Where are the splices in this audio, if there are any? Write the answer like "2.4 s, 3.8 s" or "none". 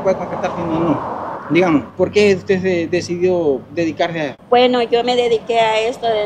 1.3 s, 1.9 s, 4.4 s